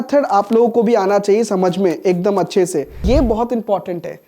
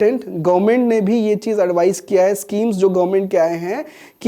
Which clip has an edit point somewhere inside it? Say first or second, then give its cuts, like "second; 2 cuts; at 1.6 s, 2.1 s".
first; 1 cut; at 3.0 s